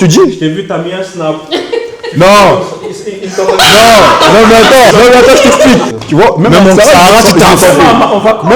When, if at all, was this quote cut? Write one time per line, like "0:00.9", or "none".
0:04.9
0:05.9

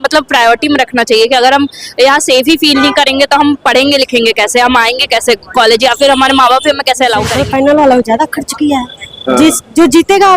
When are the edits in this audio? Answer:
0:07.4

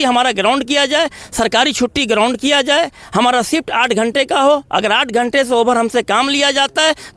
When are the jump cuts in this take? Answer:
none

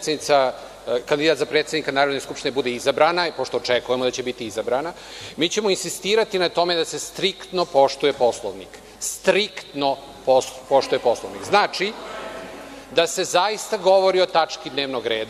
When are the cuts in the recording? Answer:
0:10.1

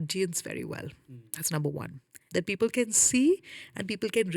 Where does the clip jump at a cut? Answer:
0:02.1

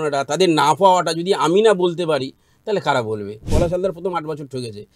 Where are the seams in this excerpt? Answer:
0:03.5

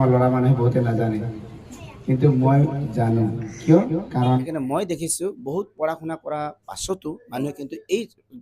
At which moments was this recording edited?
0:04.4

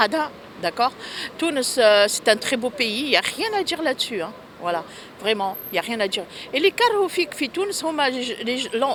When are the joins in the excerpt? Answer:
none

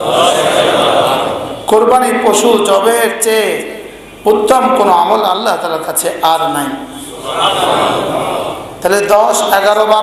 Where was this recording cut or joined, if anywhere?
none

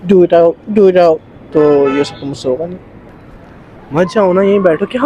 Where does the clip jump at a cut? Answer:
0:03.2

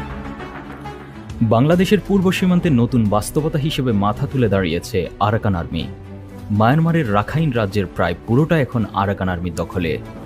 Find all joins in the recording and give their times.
none

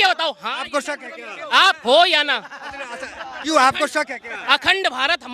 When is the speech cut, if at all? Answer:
none

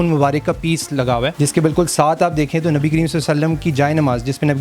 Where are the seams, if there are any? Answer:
0:01.3

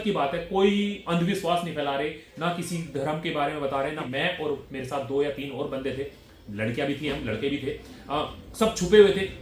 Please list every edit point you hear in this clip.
0:04.0

